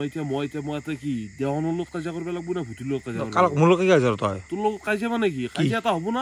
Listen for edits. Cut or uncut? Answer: uncut